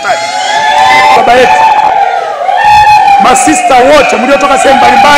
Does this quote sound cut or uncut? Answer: cut